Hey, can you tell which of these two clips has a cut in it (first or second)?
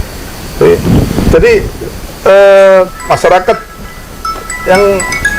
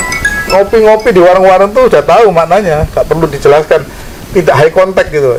first